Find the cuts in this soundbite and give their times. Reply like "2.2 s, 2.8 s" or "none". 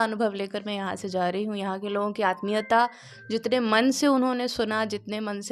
none